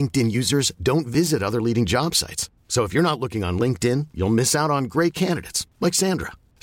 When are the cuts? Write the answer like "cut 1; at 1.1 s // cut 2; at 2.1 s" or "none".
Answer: none